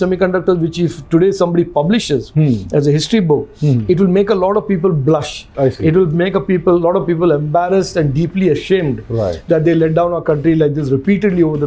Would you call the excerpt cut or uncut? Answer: uncut